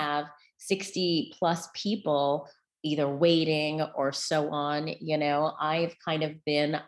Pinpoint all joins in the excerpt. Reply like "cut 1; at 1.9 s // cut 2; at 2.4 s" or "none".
none